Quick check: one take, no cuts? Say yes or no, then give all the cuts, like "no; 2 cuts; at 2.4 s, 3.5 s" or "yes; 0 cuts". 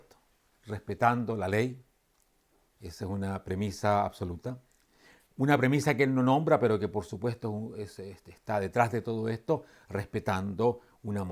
no; 1 cut; at 1.4 s